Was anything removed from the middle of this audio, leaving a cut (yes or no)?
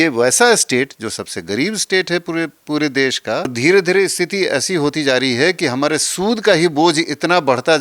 yes